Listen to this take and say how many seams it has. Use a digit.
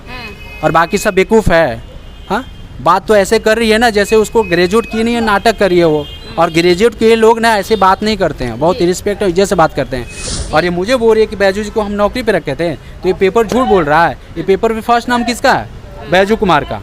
1